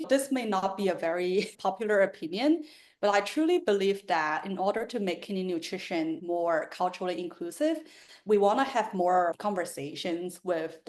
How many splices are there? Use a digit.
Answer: 2